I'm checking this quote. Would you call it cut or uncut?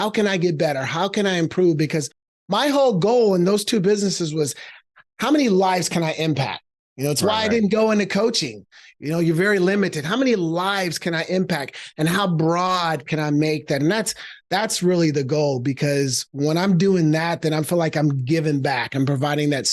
uncut